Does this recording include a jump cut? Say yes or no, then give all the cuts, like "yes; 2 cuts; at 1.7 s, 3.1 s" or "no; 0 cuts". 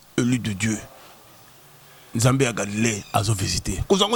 no; 0 cuts